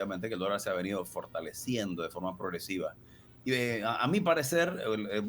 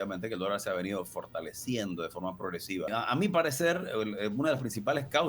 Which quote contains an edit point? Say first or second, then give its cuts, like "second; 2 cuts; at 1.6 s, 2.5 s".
second; 1 cut; at 2.9 s